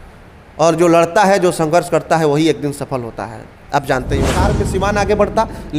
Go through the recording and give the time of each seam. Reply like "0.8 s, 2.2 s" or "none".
4.4 s